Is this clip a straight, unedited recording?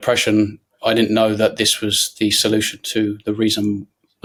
yes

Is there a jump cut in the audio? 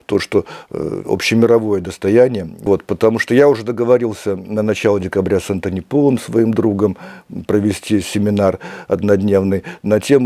yes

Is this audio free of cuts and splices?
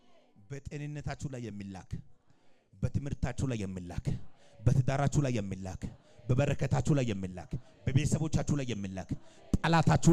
yes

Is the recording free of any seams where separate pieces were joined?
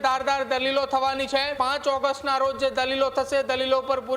no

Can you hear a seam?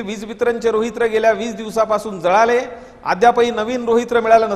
no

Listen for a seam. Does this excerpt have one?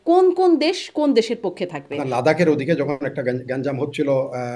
yes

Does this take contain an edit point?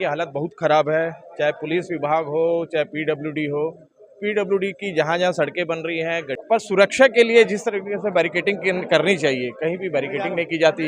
yes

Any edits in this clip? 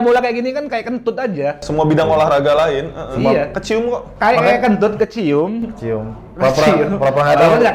no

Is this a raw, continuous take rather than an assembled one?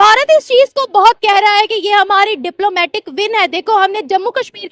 yes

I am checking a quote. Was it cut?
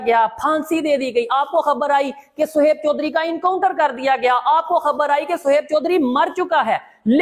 no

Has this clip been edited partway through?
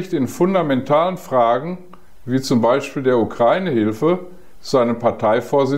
no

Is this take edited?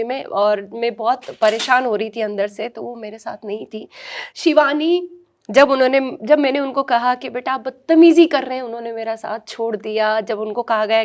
no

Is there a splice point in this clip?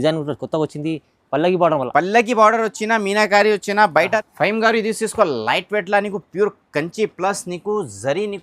yes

